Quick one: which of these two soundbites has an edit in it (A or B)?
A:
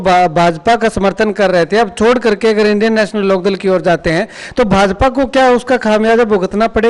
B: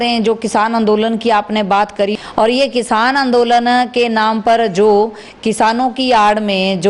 B